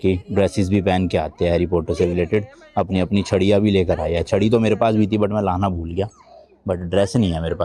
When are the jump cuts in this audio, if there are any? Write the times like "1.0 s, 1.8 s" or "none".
none

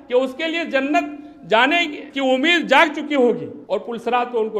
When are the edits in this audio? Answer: 2.0 s, 3.5 s

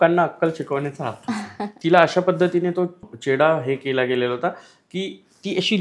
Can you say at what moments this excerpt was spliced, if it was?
1.7 s, 3.1 s

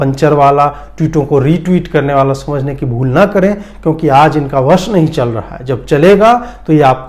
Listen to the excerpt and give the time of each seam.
none

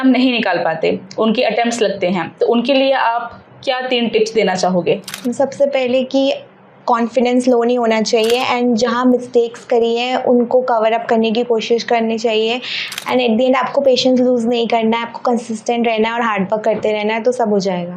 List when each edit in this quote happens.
none

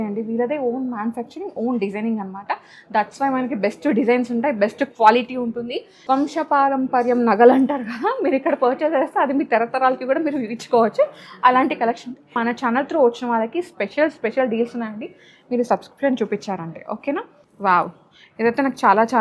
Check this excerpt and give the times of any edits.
5.9 s, 12.4 s, 17.4 s

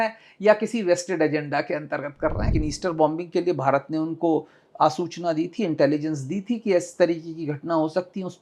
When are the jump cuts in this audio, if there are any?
2.5 s

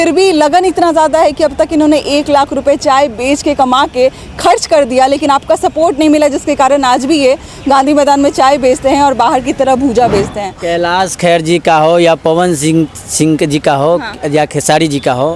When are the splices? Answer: 10.6 s

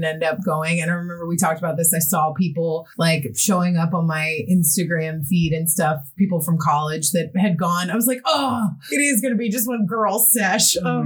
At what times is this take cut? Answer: 2.9 s, 8.8 s

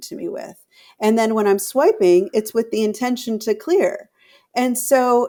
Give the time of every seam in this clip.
none

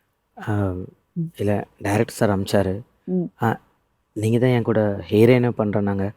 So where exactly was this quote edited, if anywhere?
none

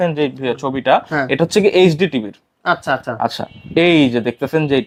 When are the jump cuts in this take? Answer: none

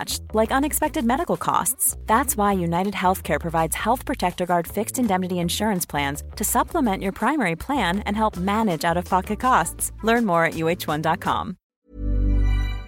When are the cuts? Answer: 11.6 s

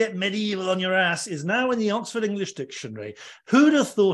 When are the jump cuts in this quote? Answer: none

